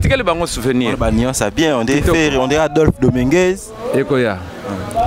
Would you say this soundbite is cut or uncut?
uncut